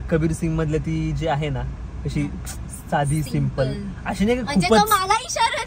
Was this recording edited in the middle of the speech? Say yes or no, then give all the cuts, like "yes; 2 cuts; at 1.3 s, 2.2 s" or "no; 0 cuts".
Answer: no; 0 cuts